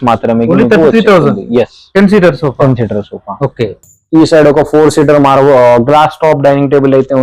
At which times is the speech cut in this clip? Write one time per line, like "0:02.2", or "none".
0:03.9